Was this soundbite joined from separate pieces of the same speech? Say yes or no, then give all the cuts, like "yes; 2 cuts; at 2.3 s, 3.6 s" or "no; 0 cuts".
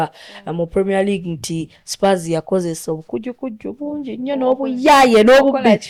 no; 0 cuts